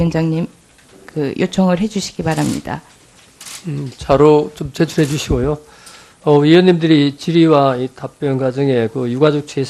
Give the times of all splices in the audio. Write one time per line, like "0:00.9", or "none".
none

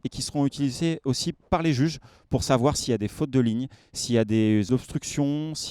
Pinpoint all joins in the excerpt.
0:04.7

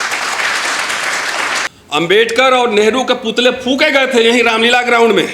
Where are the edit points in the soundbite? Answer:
0:01.7

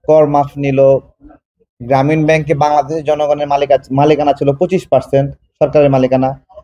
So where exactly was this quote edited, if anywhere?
none

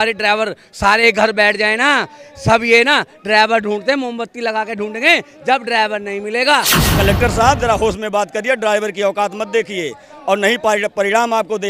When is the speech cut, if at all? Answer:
0:06.8

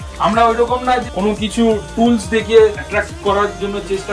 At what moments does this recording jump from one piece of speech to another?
0:01.0
0:02.8

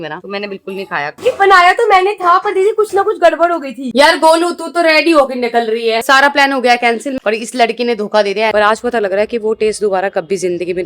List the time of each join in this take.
0:01.2
0:03.8
0:06.0
0:07.2
0:08.5

